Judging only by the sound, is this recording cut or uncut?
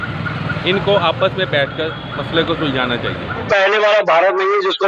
cut